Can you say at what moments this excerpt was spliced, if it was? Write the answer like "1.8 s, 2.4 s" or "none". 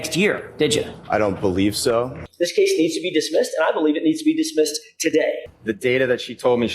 2.2 s, 5.5 s